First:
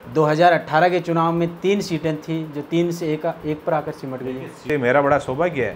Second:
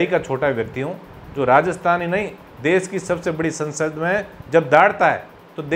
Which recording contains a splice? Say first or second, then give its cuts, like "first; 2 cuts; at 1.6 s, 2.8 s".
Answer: first; 1 cut; at 4.6 s